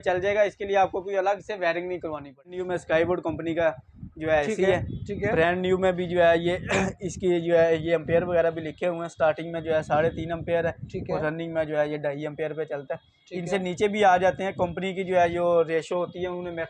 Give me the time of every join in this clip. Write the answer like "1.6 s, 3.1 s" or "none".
2.5 s